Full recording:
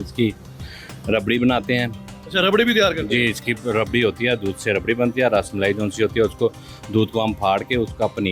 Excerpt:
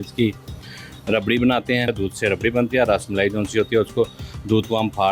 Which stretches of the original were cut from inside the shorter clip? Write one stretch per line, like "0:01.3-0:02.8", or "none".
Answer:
0:01.9-0:04.3

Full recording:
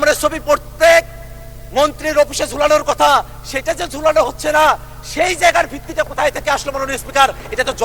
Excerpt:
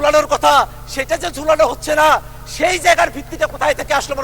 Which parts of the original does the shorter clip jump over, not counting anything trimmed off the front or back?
none

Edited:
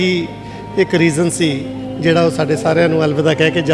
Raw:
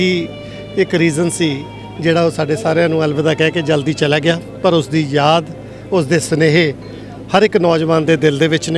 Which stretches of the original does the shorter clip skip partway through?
none

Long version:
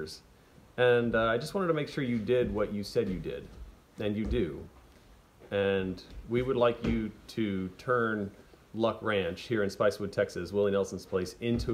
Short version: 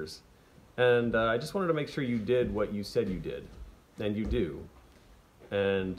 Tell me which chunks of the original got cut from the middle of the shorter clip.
none

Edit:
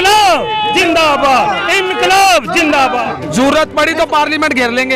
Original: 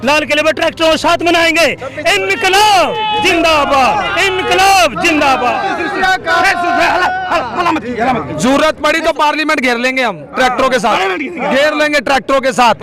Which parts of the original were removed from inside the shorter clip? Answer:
0:05.6-0:08.2

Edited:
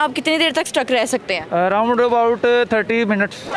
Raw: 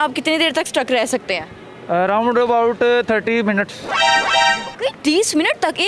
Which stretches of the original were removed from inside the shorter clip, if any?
0:01.4-0:01.7

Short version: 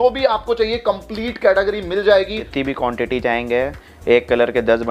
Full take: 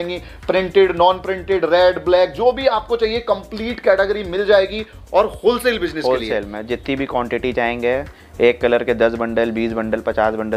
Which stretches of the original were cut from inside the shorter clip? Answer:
0:04.9-0:06.8

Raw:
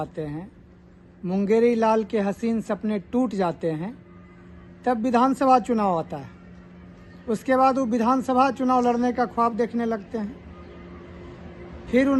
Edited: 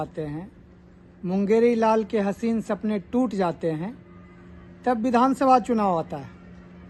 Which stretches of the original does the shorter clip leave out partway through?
none

